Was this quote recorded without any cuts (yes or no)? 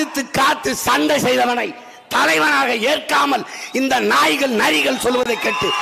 yes